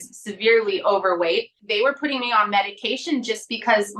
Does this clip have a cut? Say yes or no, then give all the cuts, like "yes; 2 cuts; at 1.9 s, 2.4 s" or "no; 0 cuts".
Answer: yes; 1 cut; at 1.6 s